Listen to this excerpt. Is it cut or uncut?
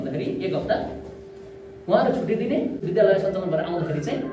cut